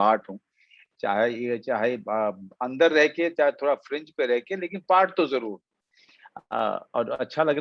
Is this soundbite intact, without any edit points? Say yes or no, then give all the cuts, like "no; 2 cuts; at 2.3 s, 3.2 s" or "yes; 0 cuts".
yes; 0 cuts